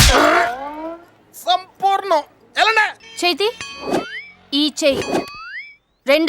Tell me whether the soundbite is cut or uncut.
cut